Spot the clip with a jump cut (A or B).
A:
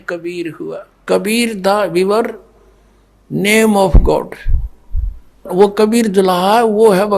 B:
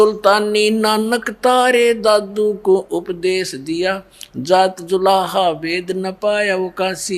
A